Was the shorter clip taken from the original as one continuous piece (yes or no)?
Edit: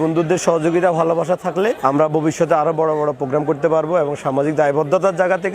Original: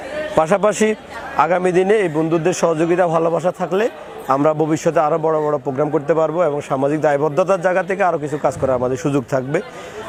no